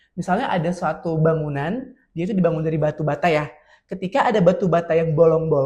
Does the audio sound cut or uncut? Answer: uncut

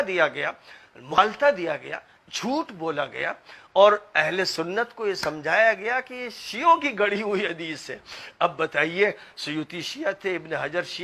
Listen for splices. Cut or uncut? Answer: cut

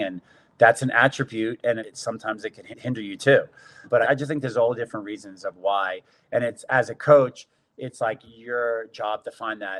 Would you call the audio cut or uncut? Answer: uncut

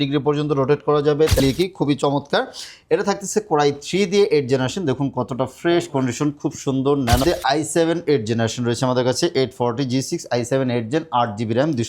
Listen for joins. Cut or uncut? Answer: cut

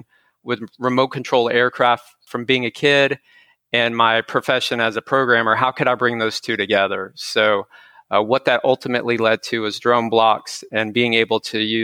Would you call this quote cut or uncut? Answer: cut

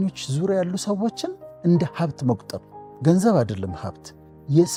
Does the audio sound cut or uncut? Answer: uncut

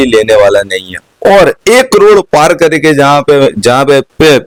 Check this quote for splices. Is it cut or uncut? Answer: uncut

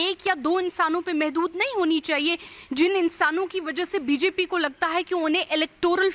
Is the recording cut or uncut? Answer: uncut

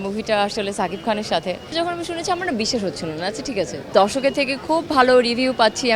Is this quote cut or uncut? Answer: cut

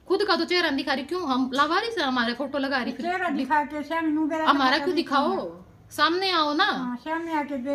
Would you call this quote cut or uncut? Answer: uncut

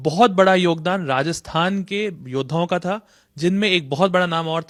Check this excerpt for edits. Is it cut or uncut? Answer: uncut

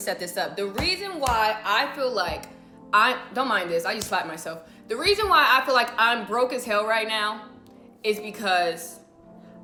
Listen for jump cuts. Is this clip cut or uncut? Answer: uncut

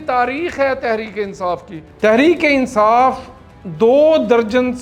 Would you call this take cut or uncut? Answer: cut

